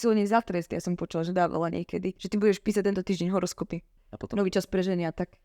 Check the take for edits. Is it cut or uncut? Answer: cut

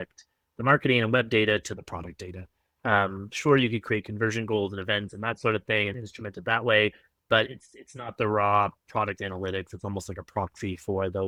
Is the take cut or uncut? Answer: uncut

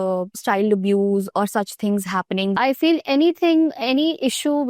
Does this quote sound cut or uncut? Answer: cut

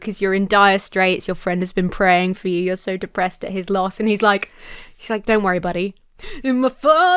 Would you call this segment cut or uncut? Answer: uncut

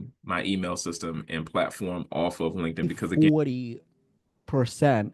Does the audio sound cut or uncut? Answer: cut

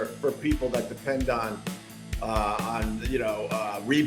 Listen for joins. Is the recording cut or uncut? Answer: uncut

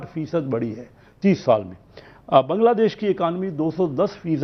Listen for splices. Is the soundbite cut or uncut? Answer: uncut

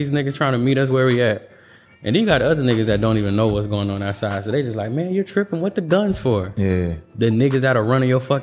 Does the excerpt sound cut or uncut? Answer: uncut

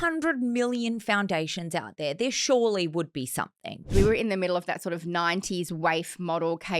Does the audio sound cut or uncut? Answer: cut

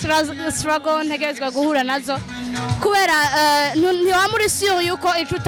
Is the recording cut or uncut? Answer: uncut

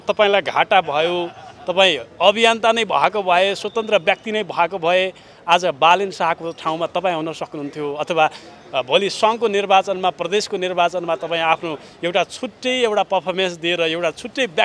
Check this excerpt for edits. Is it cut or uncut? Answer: uncut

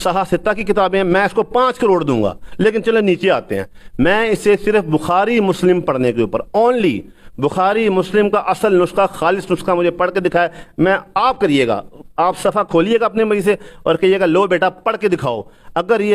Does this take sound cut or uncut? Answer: uncut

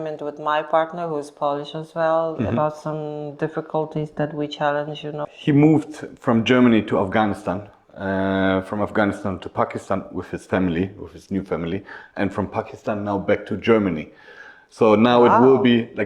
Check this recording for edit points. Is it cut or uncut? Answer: cut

